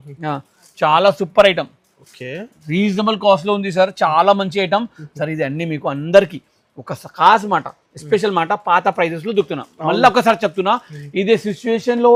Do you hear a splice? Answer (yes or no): no